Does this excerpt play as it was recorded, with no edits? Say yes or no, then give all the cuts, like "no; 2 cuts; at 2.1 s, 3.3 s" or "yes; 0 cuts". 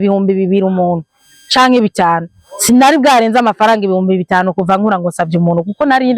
yes; 0 cuts